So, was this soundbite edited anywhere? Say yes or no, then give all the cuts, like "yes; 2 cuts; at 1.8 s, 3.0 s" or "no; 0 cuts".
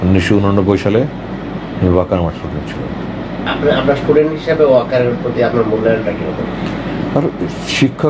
no; 0 cuts